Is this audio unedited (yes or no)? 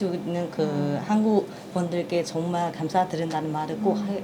yes